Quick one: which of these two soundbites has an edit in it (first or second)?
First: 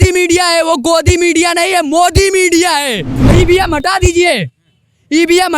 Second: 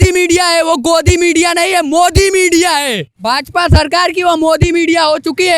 first